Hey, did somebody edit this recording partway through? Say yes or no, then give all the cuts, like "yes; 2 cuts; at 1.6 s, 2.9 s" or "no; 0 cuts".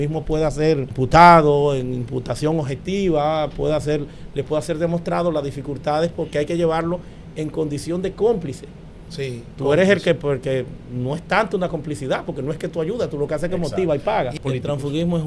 yes; 2 cuts; at 0.9 s, 14.3 s